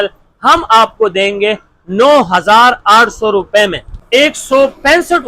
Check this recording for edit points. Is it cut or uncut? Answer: cut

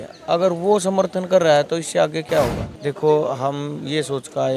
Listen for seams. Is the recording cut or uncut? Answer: cut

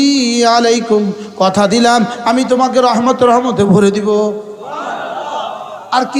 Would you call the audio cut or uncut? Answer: uncut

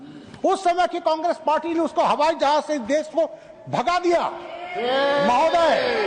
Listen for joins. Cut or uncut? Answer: uncut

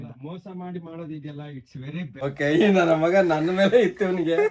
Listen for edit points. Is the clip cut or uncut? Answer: cut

